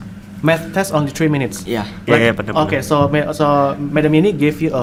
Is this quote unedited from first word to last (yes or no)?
yes